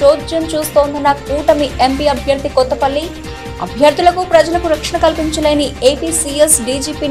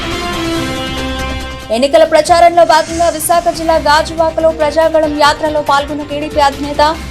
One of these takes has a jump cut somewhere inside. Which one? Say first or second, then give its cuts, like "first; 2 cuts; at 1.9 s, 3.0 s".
second; 1 cut; at 1.1 s